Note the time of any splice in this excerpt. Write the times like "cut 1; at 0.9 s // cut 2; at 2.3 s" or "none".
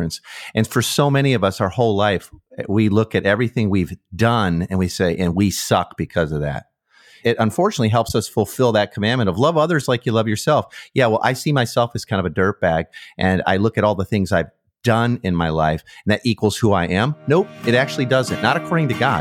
cut 1; at 7.1 s